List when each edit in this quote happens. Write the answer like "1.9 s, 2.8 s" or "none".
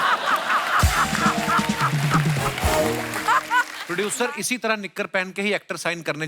3.8 s

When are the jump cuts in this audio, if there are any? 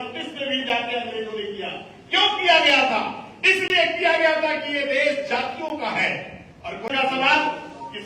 6.9 s

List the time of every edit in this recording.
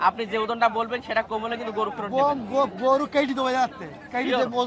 none

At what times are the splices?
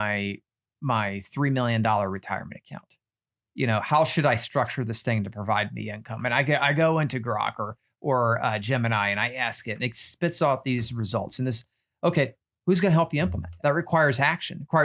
12.5 s, 13.5 s

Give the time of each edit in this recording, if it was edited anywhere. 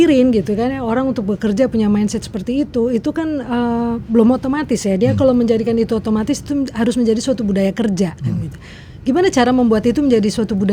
none

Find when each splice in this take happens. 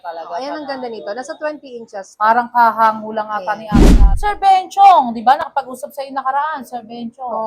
3.8 s

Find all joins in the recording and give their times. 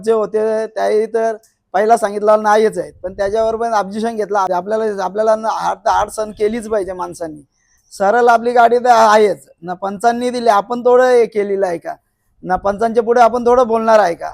4.5 s

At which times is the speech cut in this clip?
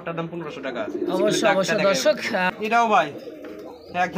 2.5 s

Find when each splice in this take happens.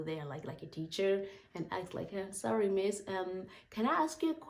none

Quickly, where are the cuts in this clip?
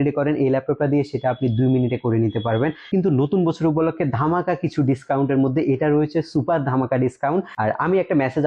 2.9 s, 7.5 s

